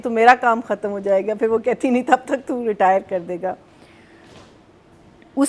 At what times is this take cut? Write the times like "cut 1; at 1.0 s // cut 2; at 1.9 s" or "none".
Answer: none